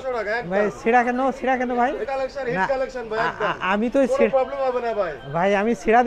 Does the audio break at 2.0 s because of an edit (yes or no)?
yes